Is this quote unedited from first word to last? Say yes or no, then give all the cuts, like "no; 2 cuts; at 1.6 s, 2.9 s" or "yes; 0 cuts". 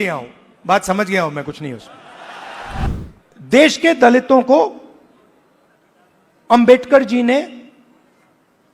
no; 1 cut; at 2.9 s